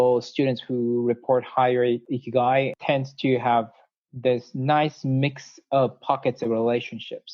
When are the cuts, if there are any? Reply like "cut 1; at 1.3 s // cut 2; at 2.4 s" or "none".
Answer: cut 1; at 2.0 s // cut 2; at 2.8 s